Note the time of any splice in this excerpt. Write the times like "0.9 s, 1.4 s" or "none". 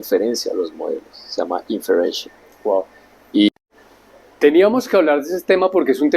3.5 s